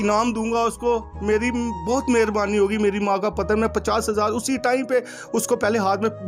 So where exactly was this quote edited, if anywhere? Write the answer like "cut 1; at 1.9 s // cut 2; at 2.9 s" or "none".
none